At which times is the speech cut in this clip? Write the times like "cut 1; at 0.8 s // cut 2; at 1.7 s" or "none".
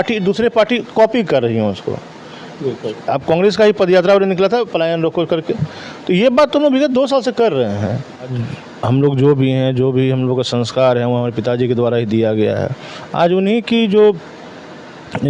cut 1; at 8.3 s